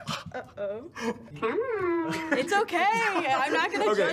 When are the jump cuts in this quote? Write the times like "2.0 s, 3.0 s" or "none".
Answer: 1.3 s